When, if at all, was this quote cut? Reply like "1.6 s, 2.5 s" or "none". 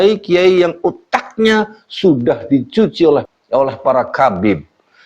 3.3 s